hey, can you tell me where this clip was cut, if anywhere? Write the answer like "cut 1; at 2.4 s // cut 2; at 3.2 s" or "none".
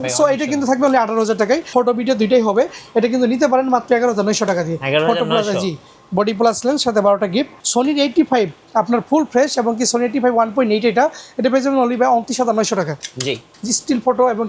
cut 1; at 1.7 s // cut 2; at 7.6 s // cut 3; at 13.4 s